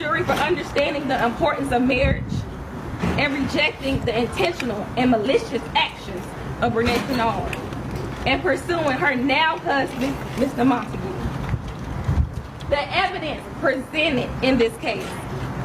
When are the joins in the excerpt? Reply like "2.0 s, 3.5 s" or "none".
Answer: none